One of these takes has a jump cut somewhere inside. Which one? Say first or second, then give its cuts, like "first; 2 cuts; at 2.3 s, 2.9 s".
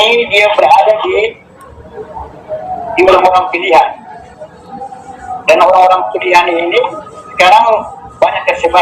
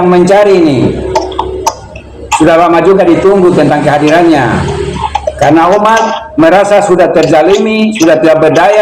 first; 1 cut; at 1.9 s